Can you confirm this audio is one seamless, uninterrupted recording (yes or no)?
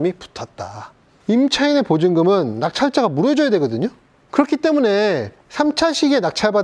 no